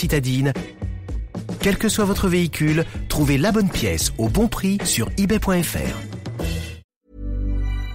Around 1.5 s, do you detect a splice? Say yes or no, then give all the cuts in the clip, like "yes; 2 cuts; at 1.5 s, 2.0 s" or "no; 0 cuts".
no; 1 cut; at 6.8 s